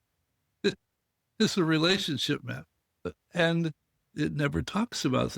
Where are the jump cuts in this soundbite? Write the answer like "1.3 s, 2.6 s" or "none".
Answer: 3.1 s